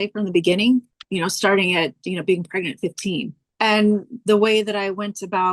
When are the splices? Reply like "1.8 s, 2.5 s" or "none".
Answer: 1.0 s, 3.4 s